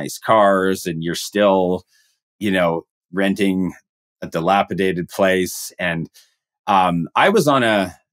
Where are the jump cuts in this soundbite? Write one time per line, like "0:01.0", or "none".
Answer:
none